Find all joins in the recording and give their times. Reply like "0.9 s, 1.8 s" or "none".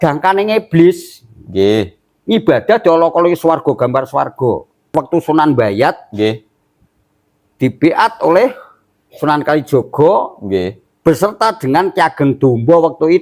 4.9 s